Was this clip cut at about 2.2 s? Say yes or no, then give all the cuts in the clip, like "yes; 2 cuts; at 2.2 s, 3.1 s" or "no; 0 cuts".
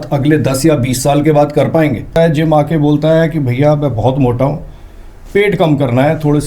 yes; 1 cut; at 2.2 s